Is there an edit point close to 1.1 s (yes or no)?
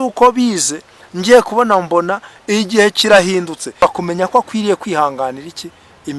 no